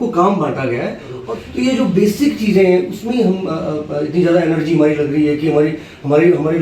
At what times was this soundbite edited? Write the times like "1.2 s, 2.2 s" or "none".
1.2 s